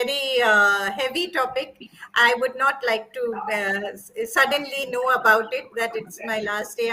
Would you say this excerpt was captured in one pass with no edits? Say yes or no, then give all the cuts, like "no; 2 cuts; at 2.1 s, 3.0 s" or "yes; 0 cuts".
yes; 0 cuts